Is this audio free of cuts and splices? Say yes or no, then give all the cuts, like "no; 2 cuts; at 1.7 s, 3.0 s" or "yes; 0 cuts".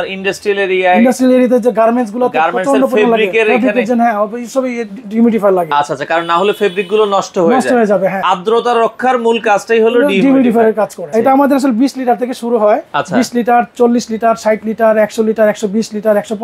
no; 2 cuts; at 8.2 s, 11.1 s